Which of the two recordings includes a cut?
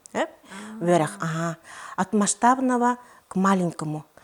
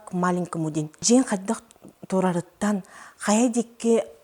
second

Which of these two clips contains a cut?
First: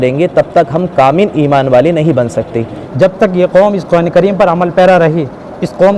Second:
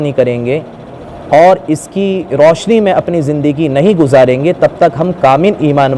first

